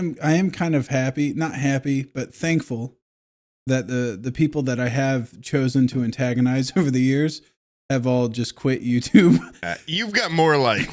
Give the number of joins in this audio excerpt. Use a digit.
1